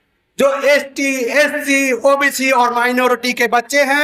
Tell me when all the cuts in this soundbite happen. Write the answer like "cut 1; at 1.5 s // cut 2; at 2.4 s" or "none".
none